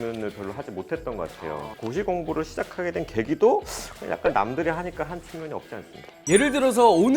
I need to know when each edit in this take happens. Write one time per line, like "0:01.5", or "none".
0:01.7
0:06.2